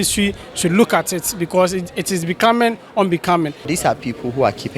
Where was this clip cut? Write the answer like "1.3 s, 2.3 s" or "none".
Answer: 3.7 s